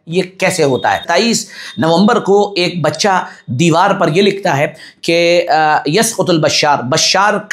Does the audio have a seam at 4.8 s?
no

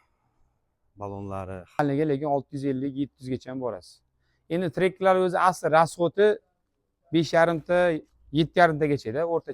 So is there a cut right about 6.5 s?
no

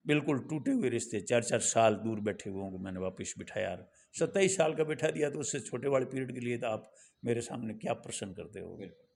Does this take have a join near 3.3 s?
no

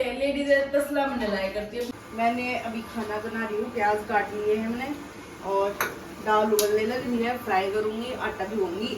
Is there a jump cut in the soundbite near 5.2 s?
no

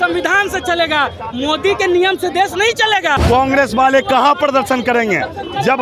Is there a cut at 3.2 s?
yes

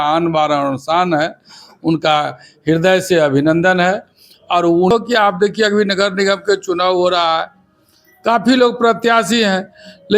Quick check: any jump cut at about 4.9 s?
yes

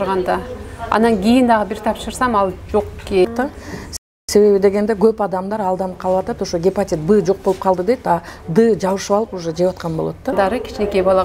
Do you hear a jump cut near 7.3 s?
no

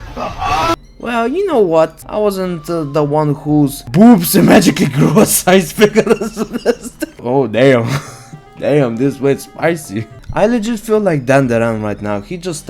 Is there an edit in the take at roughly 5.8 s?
no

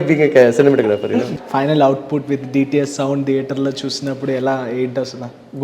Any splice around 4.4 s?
no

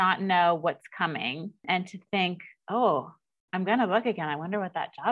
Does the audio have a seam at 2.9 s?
no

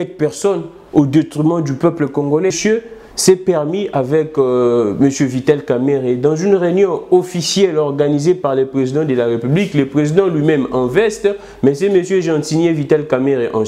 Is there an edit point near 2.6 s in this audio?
yes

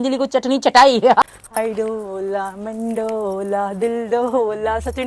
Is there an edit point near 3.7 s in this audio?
no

